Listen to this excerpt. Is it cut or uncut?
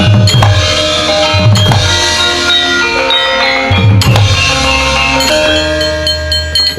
cut